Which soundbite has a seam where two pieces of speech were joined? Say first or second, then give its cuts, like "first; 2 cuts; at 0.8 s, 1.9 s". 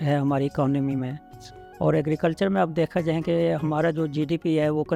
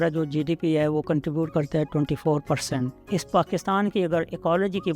second; 1 cut; at 3.0 s